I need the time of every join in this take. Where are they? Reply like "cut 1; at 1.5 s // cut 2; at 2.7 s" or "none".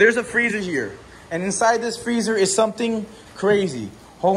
none